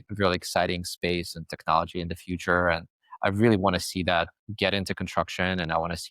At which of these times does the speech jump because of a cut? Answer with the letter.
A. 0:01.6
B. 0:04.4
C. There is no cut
B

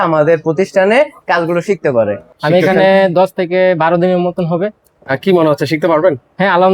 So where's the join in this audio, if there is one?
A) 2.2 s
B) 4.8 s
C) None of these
A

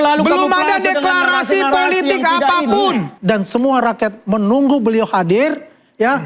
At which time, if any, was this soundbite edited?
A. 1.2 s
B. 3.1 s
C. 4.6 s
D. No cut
B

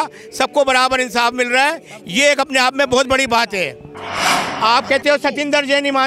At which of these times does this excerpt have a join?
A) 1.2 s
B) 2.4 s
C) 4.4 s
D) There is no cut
C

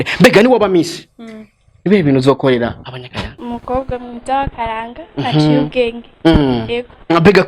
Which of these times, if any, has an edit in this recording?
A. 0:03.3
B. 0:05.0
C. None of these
A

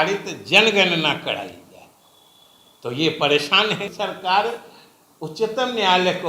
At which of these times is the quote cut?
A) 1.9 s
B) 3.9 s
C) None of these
B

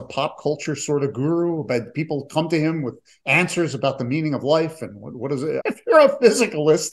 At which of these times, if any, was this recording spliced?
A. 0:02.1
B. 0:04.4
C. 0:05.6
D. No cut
C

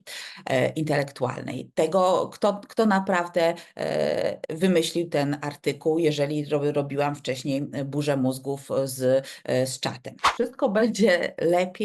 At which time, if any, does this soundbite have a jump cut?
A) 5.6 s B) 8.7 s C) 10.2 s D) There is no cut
C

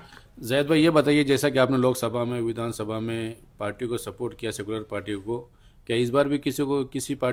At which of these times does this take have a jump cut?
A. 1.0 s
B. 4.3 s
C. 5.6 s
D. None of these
D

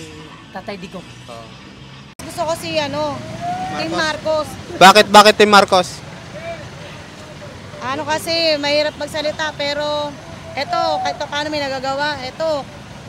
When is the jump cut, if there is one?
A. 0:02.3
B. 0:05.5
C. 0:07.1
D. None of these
A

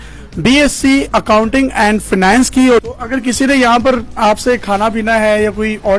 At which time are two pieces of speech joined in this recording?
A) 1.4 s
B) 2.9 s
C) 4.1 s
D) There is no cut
B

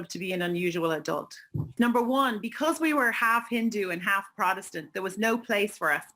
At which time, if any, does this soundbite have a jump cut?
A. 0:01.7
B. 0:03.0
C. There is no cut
A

